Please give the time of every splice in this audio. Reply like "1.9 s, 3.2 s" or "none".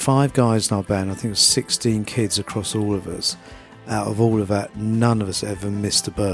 none